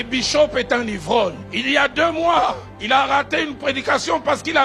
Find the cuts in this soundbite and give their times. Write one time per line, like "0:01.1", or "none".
0:01.5
0:02.7